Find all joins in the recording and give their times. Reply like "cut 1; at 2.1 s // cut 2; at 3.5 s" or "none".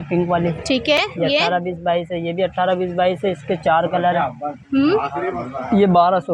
none